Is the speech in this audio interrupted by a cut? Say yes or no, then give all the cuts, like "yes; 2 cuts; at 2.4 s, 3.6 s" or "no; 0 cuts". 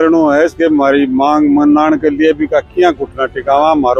no; 0 cuts